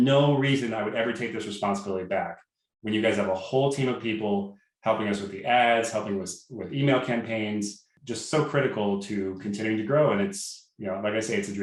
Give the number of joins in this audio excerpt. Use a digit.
0